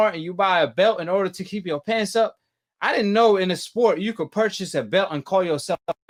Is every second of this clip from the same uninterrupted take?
yes; 0 cuts

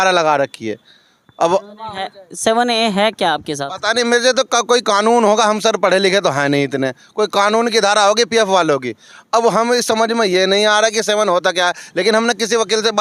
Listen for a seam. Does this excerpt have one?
no; 0 cuts

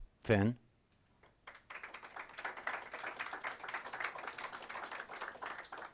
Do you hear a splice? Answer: yes; 1 cut; at 3.9 s

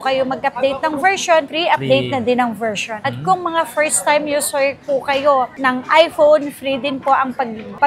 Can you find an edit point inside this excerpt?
no; 0 cuts

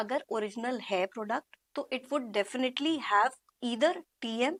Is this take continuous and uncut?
yes; 0 cuts

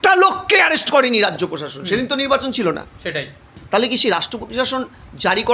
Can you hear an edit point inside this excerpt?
yes; 1 cut; at 3.5 s

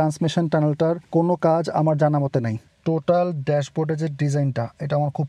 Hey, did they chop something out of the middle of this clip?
yes; 2 cuts; at 1.0 s, 2.6 s

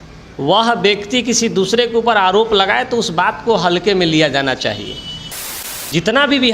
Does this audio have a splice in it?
yes; 1 cut; at 5.5 s

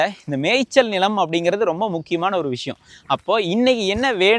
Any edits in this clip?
no; 0 cuts

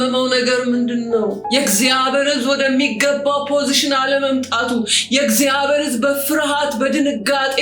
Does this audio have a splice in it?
yes; 1 cut; at 1.4 s

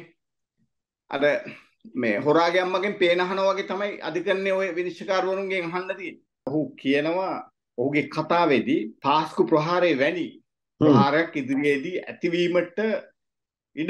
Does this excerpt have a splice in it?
yes; 2 cuts; at 6.5 s, 8.9 s

